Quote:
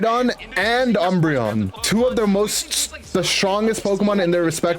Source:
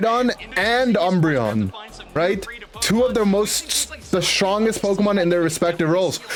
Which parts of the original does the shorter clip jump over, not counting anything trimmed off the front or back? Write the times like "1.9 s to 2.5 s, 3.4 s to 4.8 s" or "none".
1.8 s to 2.8 s